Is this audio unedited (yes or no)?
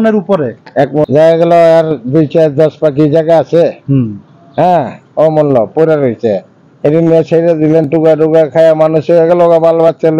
no